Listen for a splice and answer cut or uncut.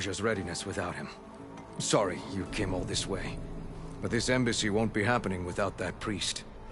uncut